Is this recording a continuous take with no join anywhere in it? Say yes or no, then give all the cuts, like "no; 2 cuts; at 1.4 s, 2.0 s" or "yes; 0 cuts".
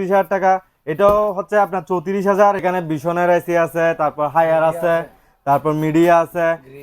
no; 1 cut; at 2.6 s